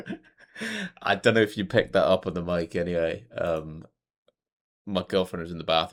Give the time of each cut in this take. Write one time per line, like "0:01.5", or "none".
none